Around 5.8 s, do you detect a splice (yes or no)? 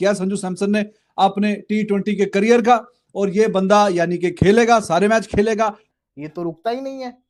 yes